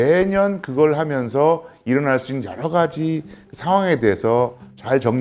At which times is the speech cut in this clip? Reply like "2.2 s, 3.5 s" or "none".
none